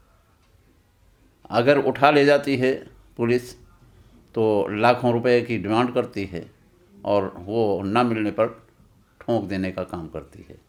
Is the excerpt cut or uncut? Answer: uncut